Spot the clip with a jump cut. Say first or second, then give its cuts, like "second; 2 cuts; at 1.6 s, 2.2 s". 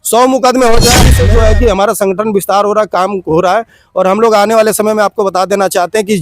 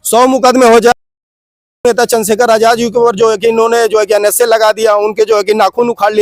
first; 1 cut; at 1.1 s